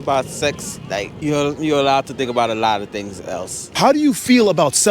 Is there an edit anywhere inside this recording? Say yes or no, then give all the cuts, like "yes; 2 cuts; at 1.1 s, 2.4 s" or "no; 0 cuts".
yes; 2 cuts; at 1.1 s, 3.6 s